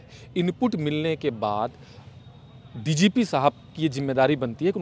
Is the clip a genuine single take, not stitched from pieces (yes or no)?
yes